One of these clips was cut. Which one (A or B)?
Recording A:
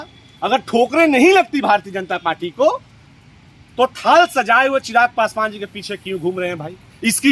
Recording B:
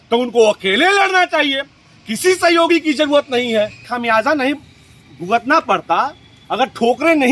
B